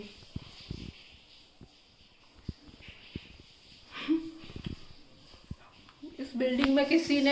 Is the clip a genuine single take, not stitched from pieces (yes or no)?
yes